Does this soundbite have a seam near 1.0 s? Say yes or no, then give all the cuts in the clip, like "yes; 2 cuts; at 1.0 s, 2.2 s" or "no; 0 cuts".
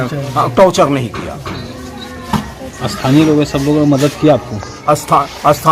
no; 0 cuts